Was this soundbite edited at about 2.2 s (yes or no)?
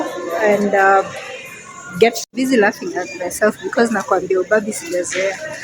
yes